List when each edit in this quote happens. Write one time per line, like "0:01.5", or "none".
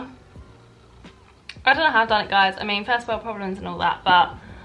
none